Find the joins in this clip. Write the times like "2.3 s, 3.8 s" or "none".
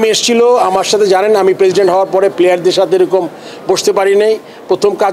none